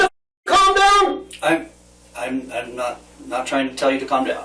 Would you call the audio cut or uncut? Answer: uncut